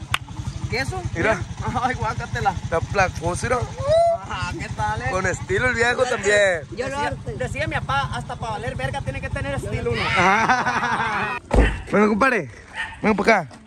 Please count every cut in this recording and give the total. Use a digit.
2